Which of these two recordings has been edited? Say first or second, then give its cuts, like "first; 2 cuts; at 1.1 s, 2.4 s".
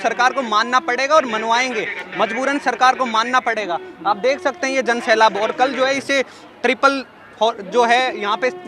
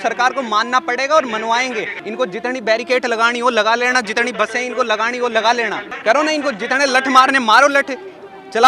second; 2 cuts; at 2.0 s, 5.9 s